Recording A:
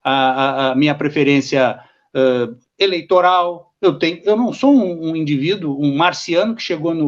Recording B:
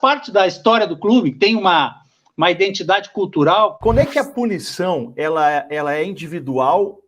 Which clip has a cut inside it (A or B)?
B